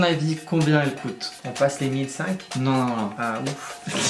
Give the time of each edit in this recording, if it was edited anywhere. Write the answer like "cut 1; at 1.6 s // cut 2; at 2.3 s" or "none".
cut 1; at 1.4 s

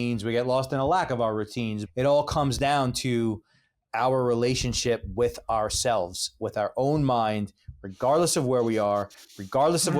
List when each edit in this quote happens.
cut 1; at 1.8 s

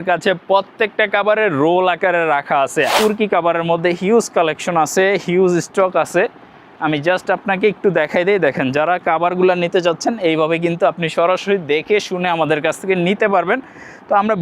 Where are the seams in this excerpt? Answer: cut 1; at 2.9 s

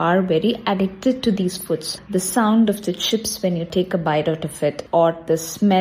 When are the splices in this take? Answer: cut 1; at 2.0 s // cut 2; at 3.7 s // cut 3; at 4.8 s

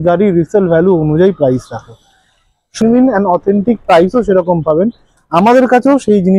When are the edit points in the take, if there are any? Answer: cut 1; at 2.8 s

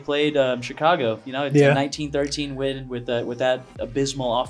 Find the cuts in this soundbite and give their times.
none

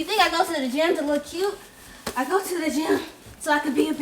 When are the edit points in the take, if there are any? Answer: none

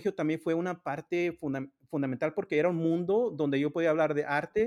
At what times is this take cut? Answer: none

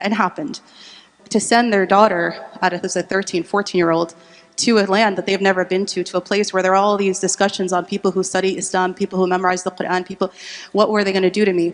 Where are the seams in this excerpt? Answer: cut 1; at 1.0 s

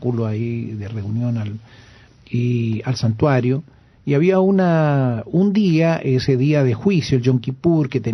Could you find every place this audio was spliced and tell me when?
none

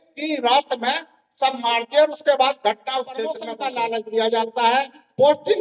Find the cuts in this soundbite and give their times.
cut 1; at 3.5 s

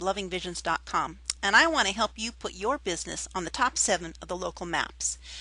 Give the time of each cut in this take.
none

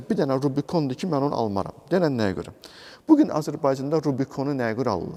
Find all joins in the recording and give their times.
none

